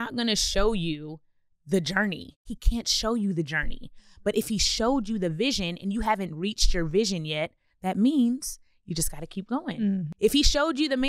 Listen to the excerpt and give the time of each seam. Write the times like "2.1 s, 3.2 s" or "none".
2.4 s